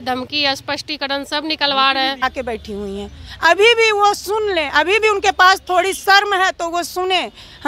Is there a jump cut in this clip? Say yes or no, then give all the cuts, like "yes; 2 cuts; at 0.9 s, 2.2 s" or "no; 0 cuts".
yes; 1 cut; at 2.2 s